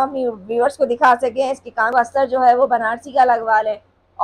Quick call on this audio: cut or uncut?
cut